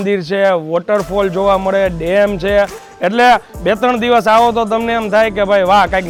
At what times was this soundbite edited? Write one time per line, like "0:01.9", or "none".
none